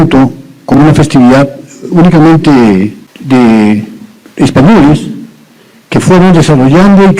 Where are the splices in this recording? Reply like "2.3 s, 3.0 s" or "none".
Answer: 3.1 s